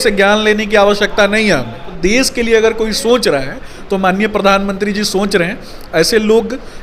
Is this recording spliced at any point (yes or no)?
yes